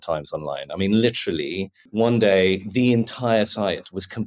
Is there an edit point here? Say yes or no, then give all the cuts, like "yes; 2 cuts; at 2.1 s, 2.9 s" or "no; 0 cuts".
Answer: yes; 1 cut; at 1.9 s